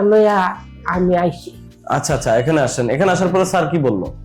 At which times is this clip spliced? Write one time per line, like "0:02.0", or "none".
none